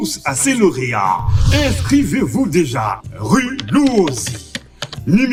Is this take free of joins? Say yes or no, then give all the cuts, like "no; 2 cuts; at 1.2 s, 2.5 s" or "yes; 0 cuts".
yes; 0 cuts